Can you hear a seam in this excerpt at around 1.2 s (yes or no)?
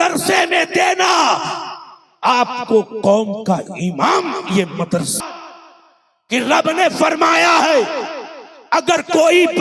no